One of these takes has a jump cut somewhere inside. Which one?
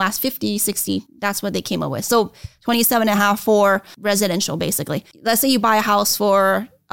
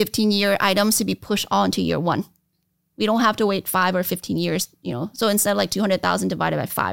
first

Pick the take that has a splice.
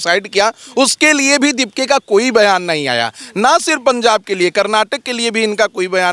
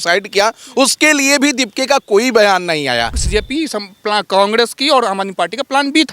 second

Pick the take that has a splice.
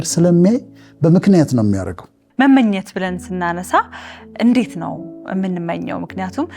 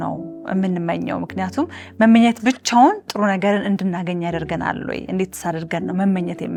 first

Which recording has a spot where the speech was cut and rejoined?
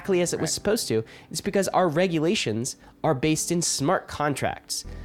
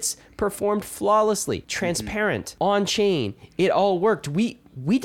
second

